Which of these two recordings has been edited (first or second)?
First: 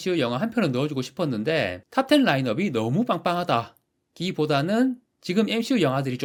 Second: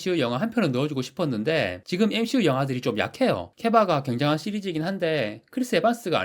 second